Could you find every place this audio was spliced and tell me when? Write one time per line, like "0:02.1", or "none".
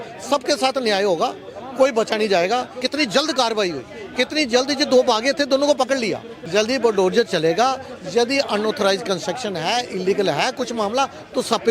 0:02.8
0:06.3